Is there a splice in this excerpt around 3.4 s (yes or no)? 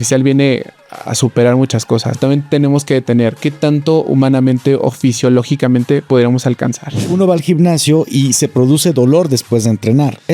no